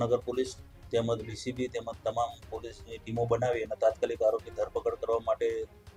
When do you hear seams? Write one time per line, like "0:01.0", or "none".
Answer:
none